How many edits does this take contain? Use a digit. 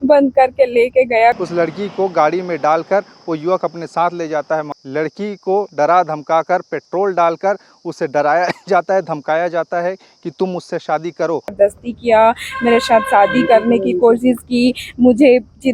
3